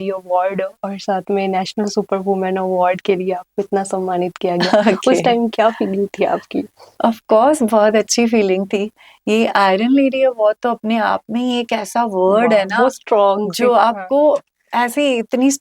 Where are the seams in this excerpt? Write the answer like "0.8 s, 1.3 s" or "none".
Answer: none